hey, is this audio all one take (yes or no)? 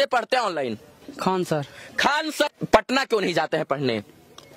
no